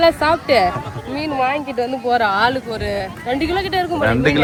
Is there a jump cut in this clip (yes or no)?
no